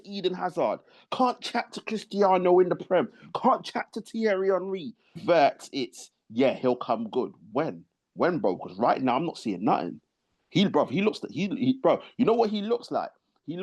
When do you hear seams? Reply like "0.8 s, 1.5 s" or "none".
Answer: 5.2 s